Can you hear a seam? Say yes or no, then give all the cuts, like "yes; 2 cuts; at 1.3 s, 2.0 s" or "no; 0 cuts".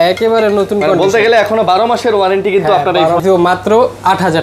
yes; 1 cut; at 3.2 s